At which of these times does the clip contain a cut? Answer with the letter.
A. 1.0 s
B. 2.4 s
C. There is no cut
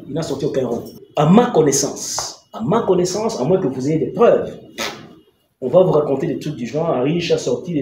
A